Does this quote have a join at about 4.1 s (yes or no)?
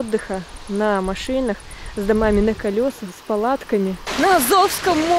yes